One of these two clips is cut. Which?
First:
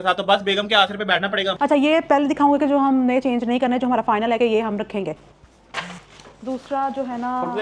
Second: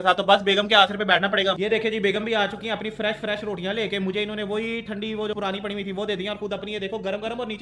first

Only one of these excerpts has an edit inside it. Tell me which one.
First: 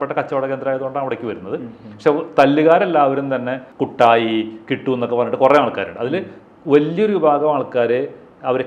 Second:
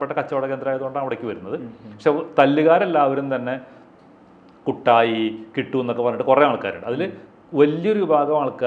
first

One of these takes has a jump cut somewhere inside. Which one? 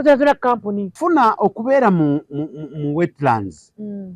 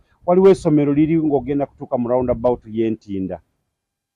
first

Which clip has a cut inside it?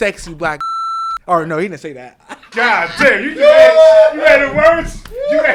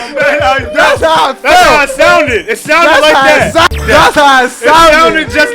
second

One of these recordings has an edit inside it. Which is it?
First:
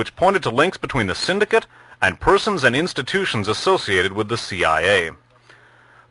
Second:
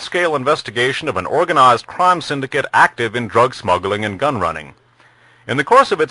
second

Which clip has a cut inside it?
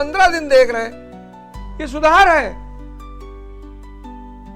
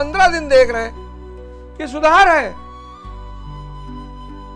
second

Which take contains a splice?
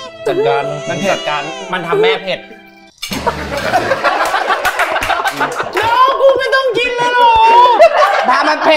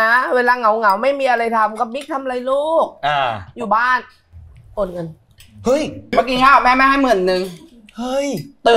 second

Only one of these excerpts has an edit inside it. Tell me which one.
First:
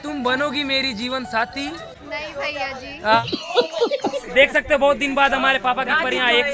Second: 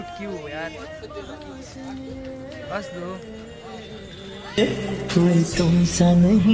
first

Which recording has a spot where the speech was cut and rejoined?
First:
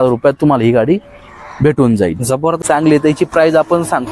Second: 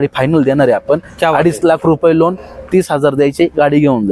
first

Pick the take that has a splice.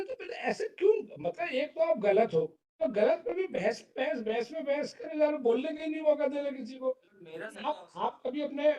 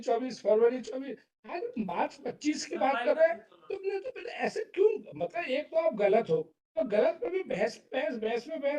first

